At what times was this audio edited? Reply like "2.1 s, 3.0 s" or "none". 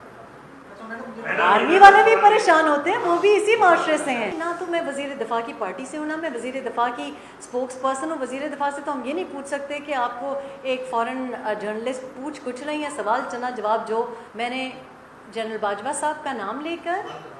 4.4 s, 14.2 s